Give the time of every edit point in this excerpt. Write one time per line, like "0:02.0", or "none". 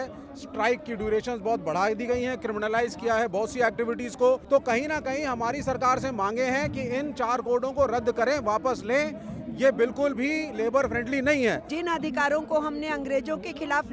0:04.4
0:11.7